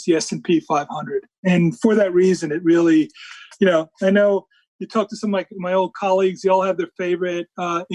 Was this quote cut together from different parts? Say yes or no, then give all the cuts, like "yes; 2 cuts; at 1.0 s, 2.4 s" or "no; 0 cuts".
no; 0 cuts